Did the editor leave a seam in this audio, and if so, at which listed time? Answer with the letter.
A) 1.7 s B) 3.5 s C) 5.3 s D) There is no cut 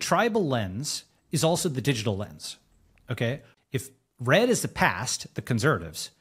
B